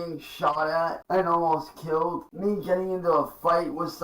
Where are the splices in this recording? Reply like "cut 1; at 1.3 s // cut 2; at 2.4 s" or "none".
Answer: cut 1; at 1.0 s // cut 2; at 2.3 s